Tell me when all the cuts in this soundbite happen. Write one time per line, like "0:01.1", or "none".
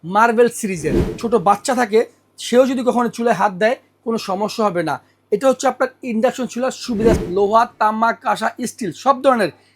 0:01.0
0:07.2